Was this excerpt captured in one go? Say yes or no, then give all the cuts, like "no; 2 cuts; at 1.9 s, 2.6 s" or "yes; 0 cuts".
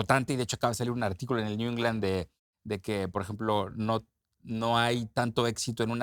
yes; 0 cuts